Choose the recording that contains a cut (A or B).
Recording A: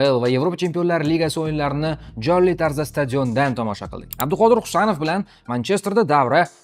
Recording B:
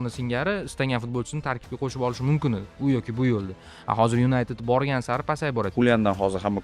B